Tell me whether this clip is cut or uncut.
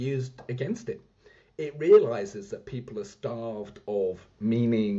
uncut